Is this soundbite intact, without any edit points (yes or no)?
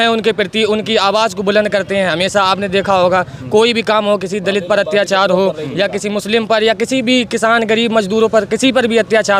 yes